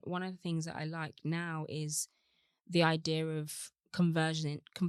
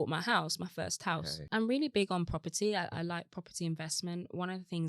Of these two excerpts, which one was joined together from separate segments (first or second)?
second